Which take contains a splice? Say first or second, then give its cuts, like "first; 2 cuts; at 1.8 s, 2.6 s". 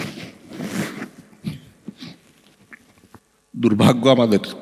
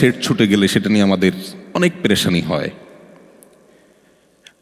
first; 1 cut; at 3.3 s